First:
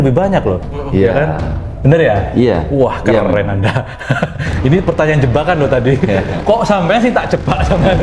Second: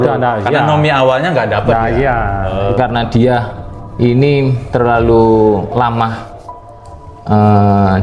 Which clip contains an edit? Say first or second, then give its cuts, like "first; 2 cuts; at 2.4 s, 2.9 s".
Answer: second; 1 cut; at 2.8 s